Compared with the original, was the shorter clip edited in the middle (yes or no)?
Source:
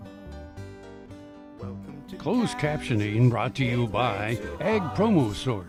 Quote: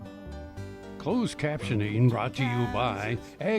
yes